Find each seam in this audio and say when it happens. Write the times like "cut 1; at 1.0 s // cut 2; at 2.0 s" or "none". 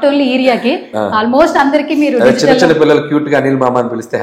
none